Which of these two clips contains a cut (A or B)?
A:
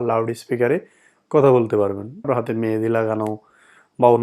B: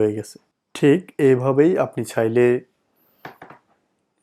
A